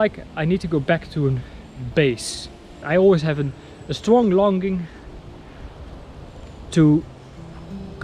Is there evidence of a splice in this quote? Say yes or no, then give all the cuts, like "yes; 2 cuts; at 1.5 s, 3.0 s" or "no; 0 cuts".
yes; 1 cut; at 2.8 s